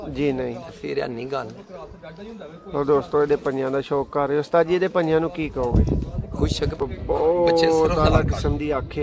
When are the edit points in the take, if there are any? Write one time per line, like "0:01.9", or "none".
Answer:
0:06.8